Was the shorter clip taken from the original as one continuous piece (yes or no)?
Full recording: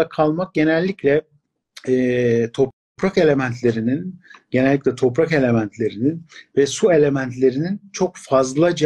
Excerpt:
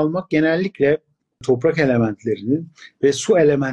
no